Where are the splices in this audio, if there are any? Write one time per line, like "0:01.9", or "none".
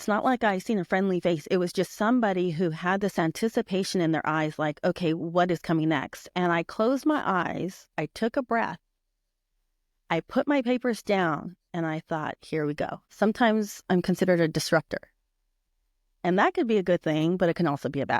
0:13.0

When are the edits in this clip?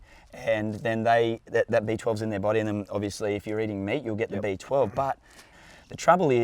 0:05.5

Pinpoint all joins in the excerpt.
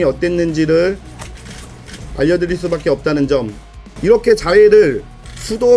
0:03.6

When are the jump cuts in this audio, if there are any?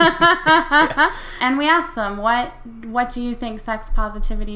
0:01.3

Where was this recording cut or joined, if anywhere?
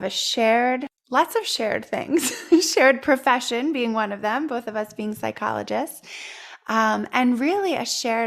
0:01.0

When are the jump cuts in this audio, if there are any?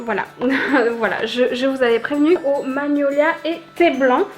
0:02.4

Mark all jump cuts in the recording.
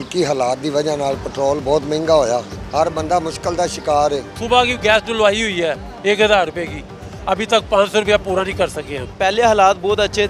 0:02.6
0:04.4
0:09.1

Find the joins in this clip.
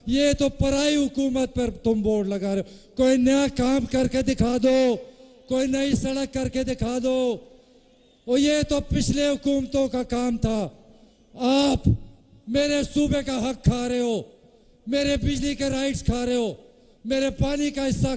0:06.8

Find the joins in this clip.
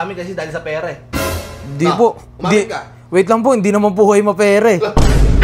none

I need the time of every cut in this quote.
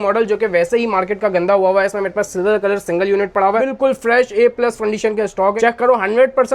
0:03.6
0:05.6

